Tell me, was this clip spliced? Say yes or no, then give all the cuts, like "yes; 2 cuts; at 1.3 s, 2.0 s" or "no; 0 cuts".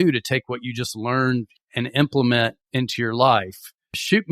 yes; 1 cut; at 1.6 s